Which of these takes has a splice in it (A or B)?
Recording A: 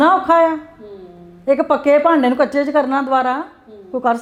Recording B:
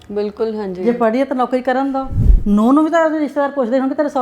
B